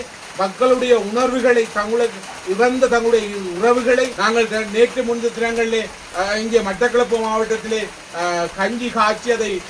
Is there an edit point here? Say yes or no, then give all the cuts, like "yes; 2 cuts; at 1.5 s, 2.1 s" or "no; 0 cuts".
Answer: yes; 1 cut; at 4.2 s